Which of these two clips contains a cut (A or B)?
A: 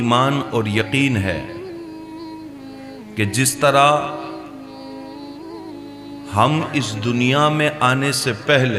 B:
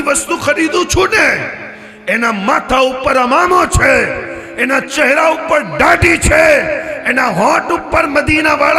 A